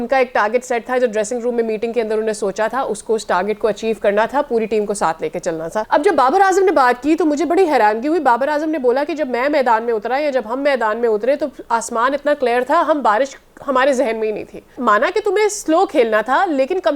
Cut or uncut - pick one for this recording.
cut